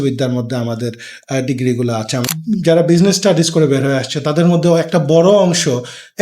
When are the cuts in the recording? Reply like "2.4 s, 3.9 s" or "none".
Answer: 2.3 s

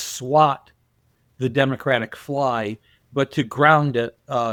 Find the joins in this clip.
none

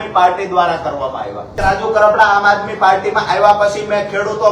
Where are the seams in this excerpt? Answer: 1.6 s

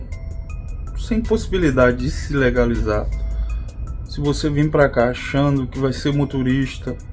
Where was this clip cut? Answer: none

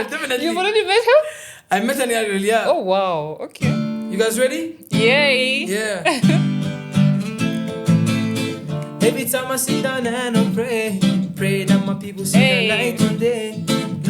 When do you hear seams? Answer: 3.4 s

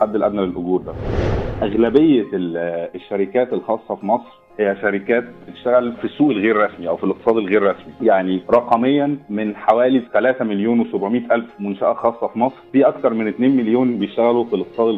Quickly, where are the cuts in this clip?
1.3 s, 6.0 s, 8.2 s, 9.3 s, 12.6 s

